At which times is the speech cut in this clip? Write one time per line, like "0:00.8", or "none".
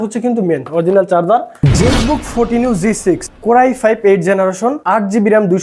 0:01.5
0:03.3
0:04.8